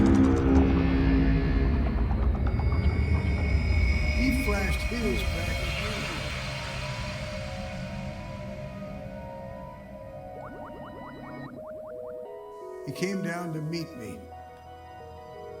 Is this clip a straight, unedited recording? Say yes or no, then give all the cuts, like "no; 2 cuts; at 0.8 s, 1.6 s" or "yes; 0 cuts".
no; 1 cut; at 12.2 s